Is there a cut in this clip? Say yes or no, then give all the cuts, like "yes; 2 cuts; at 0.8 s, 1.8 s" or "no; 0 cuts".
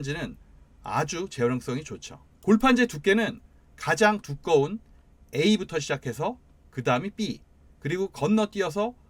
no; 0 cuts